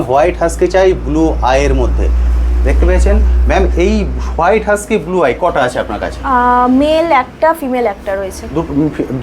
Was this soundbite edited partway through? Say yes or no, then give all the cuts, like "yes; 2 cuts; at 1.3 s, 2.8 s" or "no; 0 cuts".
no; 0 cuts